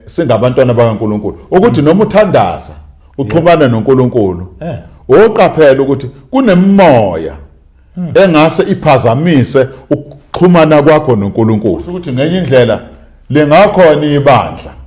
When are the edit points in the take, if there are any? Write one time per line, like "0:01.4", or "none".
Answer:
0:12.1